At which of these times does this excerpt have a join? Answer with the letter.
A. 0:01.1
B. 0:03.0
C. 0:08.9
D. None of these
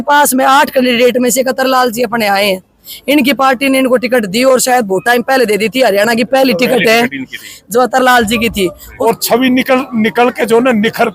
C